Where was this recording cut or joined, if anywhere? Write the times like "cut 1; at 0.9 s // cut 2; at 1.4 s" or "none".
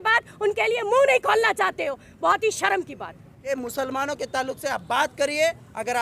cut 1; at 3.5 s